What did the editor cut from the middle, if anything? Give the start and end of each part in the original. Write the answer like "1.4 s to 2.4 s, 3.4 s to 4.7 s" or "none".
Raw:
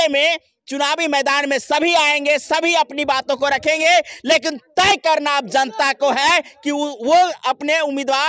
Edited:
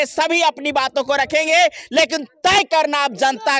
none